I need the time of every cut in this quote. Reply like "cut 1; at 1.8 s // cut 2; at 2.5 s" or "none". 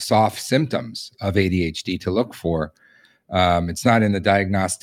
none